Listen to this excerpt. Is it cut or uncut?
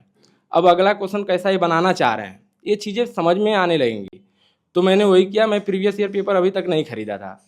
uncut